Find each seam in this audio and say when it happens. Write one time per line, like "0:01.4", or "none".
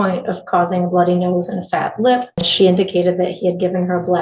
0:02.5